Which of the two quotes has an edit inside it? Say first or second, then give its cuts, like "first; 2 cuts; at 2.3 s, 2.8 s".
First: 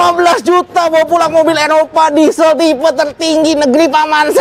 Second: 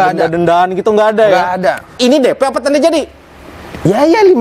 second; 1 cut; at 1.9 s